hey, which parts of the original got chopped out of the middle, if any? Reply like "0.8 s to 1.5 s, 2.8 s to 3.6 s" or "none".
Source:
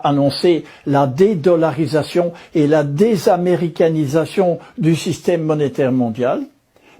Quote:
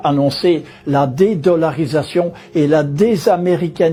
none

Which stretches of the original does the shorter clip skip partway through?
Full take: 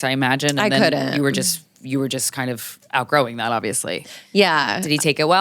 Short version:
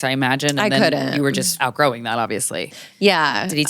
1.5 s to 2.8 s

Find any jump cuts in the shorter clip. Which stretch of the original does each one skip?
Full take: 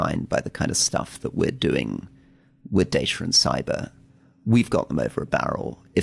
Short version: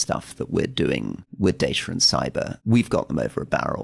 2.1 s to 2.5 s, 3.9 s to 4.4 s

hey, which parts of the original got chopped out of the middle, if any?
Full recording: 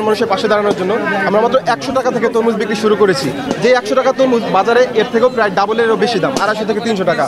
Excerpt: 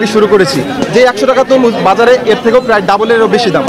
none

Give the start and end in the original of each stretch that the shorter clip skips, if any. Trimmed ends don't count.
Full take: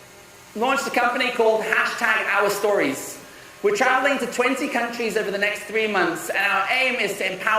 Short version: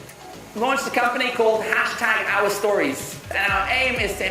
3.3 s to 6.3 s

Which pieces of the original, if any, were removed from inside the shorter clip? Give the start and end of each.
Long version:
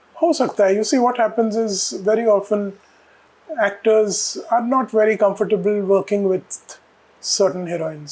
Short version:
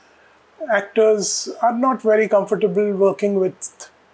none

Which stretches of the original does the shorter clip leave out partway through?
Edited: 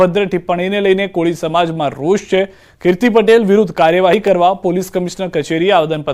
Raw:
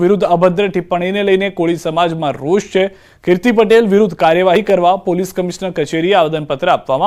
none

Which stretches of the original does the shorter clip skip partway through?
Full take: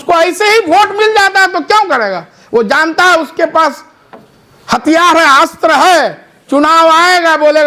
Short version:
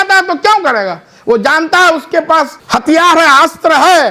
3.8 s to 4.6 s

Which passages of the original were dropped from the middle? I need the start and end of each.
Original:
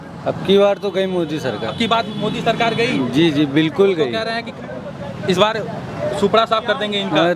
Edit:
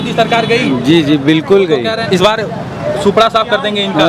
4.3 s to 5.2 s

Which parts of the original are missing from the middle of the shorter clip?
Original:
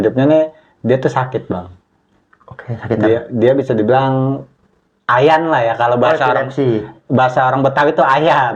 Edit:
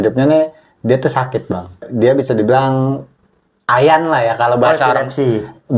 1.9 s to 3.3 s

